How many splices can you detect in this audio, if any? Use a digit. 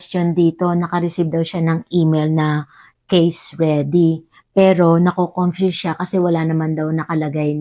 0